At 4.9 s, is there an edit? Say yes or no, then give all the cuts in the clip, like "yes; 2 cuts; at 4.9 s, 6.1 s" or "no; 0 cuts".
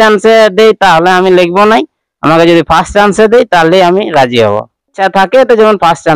yes; 1 cut; at 4.9 s